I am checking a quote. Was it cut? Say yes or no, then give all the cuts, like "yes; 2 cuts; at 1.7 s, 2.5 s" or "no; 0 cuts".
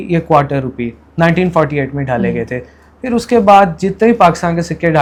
no; 0 cuts